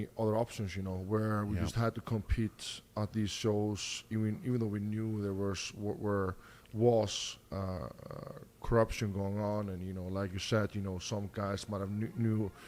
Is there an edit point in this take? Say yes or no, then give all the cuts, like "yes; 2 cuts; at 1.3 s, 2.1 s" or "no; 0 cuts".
no; 0 cuts